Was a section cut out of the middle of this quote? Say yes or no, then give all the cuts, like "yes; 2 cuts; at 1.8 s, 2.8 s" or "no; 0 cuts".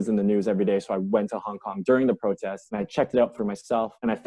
no; 0 cuts